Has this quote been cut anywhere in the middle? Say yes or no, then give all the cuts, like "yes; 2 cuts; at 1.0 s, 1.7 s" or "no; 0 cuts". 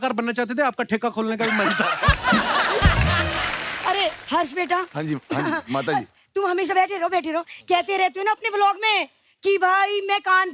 yes; 1 cut; at 3.7 s